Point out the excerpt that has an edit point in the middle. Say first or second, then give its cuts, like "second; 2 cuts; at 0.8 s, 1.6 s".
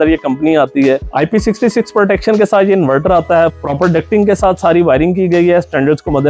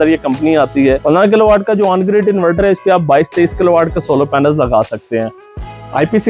first; 2 cuts; at 1.0 s, 3.5 s